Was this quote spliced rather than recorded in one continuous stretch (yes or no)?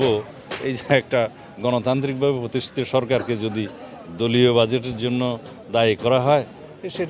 no